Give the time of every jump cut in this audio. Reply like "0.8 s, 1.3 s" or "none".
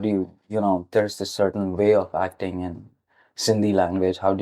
none